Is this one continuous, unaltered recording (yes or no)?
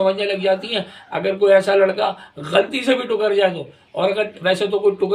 yes